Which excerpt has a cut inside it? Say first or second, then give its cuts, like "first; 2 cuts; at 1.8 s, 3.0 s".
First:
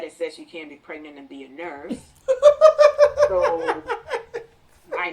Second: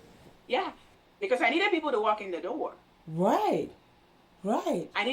second; 1 cut; at 1.0 s